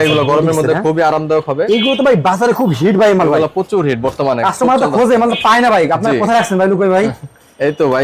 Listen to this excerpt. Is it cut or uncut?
uncut